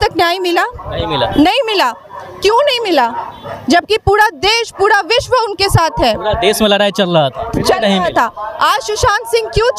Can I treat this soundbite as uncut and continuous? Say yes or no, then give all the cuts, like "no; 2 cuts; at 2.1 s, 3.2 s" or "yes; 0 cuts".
yes; 0 cuts